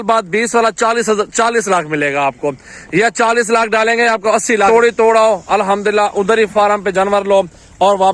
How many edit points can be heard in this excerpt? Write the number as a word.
one